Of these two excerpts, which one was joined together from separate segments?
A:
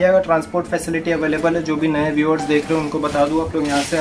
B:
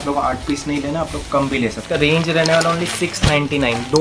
B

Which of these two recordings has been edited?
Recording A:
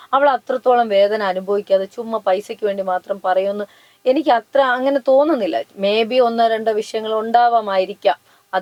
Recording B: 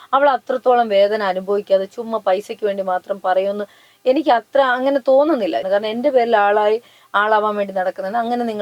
B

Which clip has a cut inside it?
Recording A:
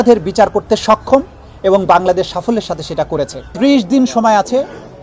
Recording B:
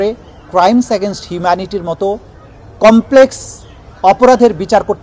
A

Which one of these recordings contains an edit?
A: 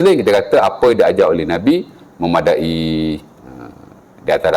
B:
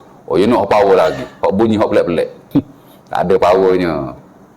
B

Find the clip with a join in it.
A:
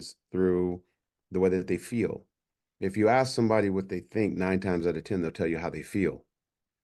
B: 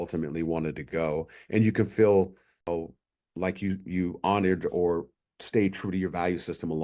B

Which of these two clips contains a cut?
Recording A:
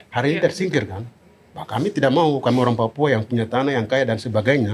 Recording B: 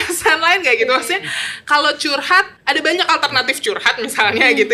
B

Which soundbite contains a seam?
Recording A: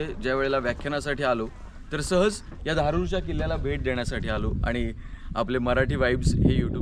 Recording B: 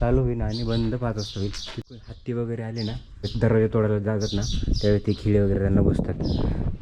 B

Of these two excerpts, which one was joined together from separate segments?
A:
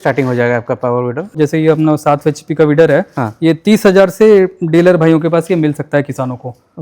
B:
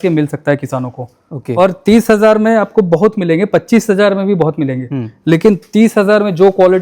A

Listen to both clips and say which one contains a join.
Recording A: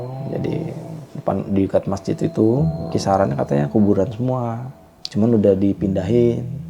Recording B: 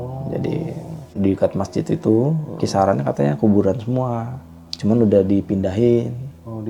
B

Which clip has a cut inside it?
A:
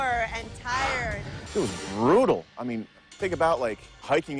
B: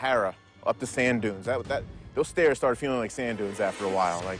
A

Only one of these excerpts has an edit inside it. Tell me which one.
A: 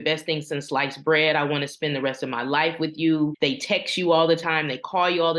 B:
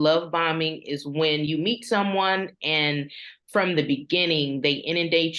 A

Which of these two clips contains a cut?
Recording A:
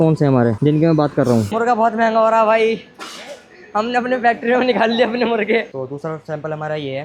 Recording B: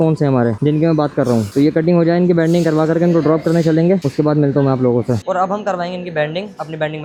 A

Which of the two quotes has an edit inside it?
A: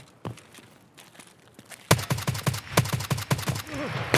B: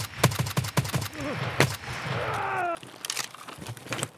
B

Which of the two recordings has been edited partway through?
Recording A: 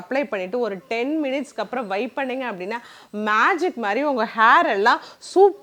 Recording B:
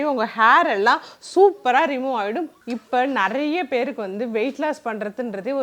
B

